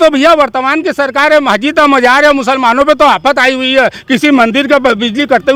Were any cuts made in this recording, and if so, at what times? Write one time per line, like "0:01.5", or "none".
none